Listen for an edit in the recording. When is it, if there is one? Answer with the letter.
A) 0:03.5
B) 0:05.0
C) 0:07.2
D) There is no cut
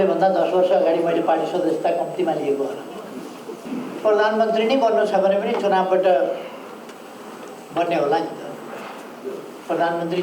A